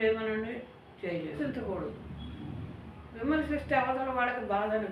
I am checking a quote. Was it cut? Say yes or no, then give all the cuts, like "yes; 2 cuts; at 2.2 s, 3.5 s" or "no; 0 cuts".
yes; 1 cut; at 1.4 s